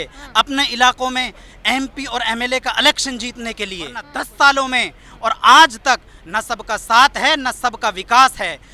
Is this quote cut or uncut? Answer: cut